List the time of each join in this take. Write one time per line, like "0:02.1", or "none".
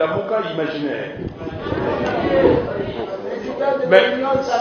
none